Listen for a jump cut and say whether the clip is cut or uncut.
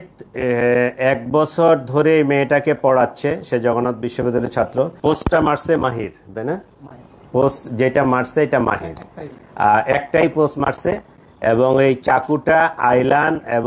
cut